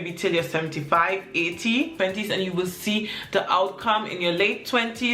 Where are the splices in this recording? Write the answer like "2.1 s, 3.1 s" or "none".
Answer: 2.0 s